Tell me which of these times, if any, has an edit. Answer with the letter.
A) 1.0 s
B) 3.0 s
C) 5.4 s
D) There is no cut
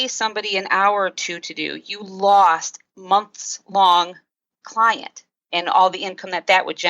B